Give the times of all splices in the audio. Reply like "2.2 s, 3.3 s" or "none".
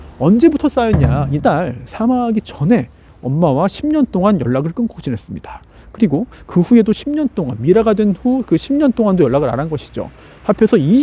1.3 s